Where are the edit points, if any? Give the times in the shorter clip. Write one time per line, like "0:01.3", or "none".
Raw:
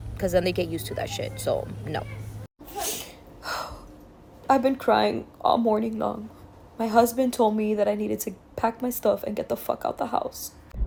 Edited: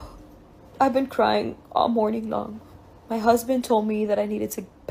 none